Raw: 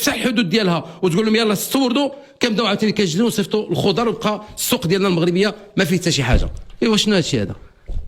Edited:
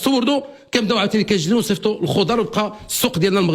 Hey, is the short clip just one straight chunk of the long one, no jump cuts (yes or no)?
yes